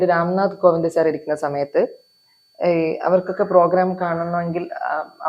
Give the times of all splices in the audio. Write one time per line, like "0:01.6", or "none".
none

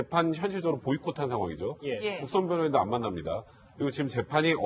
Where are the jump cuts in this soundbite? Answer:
0:01.8

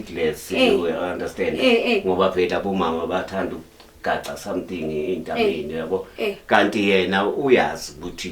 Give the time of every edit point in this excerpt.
none

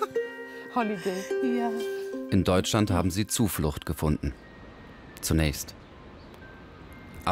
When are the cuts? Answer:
0:02.0

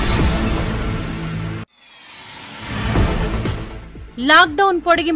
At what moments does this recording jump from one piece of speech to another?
0:01.3
0:03.4

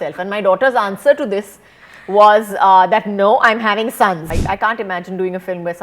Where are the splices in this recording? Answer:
0:04.3

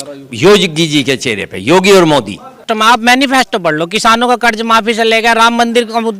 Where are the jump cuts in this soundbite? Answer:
0:02.7

